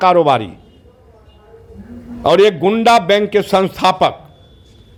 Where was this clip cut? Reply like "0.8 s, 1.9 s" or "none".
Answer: none